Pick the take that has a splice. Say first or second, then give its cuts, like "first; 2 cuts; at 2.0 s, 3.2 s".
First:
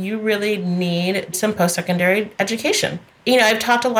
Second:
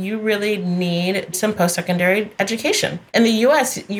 second; 1 cut; at 2.9 s